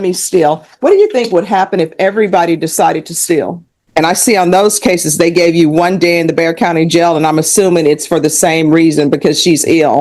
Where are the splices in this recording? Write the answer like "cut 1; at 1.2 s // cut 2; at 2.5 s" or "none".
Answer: cut 1; at 3.8 s